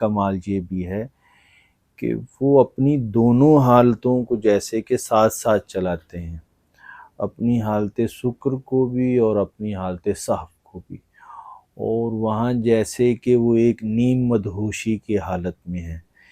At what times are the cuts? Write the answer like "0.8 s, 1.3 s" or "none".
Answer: none